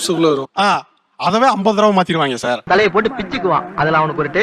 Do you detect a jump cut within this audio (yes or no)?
yes